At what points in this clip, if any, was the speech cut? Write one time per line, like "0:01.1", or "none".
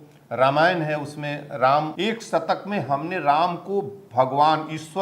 0:01.9

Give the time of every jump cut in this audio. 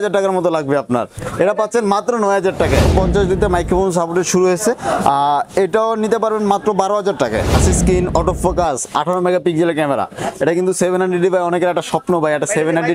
0:02.9
0:07.5

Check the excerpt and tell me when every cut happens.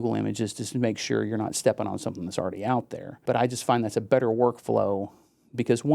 0:03.1

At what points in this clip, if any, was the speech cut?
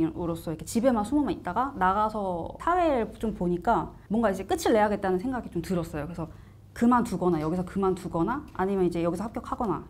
0:02.5
0:04.0

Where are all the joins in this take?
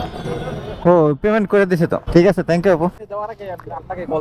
0:02.0
0:02.9

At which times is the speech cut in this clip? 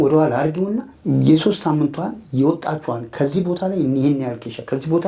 0:00.9

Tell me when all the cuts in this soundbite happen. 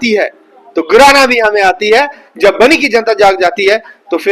0:02.2

